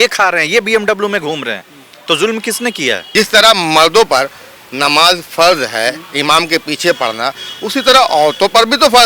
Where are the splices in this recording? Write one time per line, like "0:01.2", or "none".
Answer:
0:03.0